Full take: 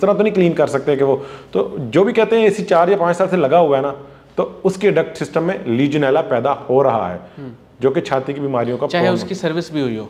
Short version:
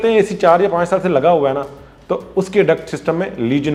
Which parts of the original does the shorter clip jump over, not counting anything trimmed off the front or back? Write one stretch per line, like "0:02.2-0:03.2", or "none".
none

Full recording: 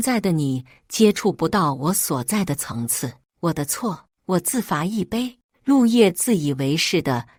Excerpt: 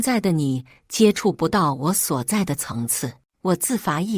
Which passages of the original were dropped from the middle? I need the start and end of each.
0:03.2-0:04.1

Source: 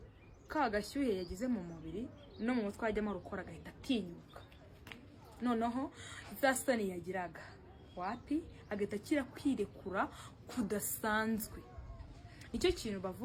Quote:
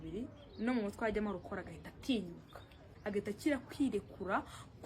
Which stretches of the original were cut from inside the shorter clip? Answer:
0:04.7-0:08.6

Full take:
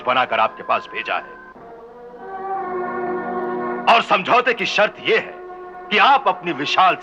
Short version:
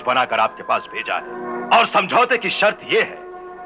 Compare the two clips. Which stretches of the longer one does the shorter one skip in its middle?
0:01.4-0:03.5

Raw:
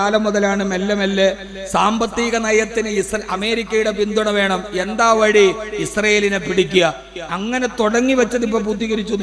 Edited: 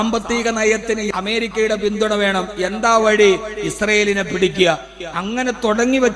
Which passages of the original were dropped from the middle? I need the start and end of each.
0:02.9-0:03.2

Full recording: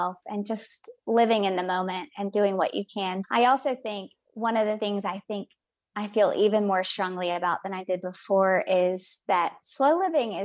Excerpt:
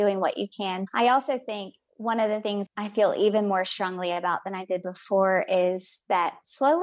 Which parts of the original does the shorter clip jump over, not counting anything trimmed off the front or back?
0:05.0-0:05.9

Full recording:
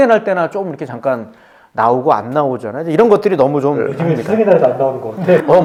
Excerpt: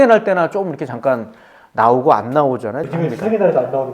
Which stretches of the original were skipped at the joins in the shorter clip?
0:02.8-0:03.9

